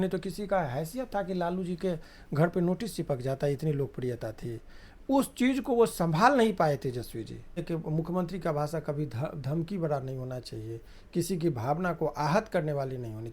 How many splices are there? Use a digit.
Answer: 1